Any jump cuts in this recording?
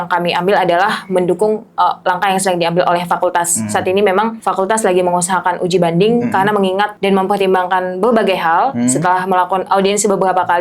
yes; 2 cuts; at 4.4 s, 6.9 s

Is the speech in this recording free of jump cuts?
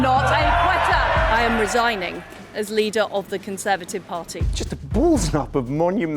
no; 2 cuts; at 1.3 s, 4.4 s

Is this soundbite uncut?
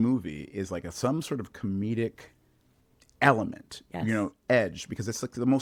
yes; 0 cuts

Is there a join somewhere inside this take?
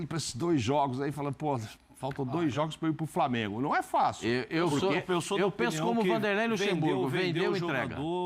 no; 0 cuts

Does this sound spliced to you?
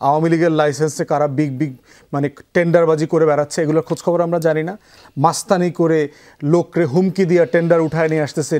no; 0 cuts

